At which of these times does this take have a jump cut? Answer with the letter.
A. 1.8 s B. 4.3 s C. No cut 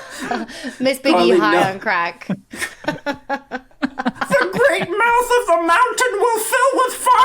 B